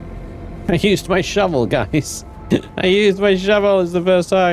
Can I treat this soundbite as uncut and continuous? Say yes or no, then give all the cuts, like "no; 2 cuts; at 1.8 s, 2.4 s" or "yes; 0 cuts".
yes; 0 cuts